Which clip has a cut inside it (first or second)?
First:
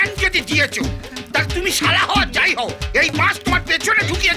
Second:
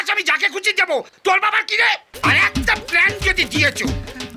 second